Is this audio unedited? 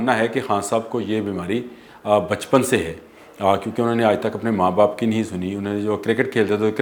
yes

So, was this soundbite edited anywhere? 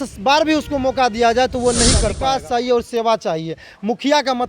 yes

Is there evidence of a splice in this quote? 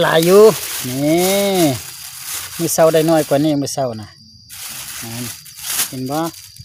no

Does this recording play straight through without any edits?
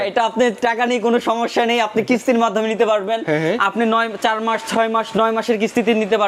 yes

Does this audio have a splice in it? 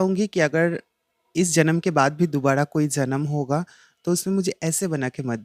no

